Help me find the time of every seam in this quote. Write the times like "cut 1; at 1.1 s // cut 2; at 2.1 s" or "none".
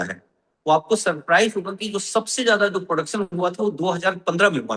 none